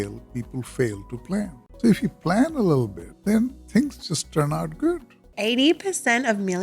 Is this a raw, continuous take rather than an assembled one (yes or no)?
no